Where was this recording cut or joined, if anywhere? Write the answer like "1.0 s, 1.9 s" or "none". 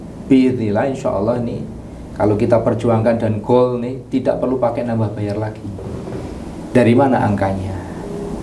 none